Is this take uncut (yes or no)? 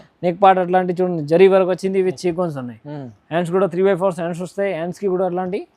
yes